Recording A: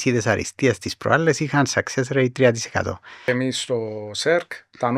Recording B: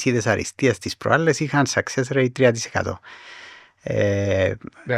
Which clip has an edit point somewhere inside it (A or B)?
A